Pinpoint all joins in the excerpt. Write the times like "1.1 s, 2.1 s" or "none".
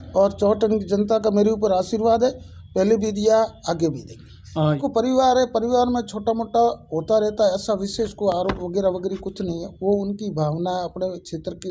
4.8 s